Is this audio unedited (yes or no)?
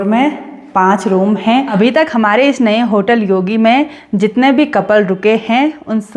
no